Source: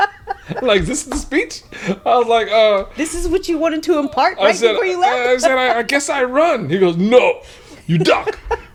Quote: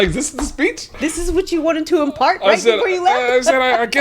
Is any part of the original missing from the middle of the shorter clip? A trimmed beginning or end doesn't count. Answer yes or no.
yes